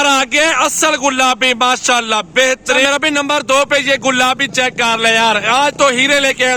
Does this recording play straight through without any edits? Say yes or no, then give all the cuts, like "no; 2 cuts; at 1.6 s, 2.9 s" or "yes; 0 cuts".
no; 1 cut; at 2.8 s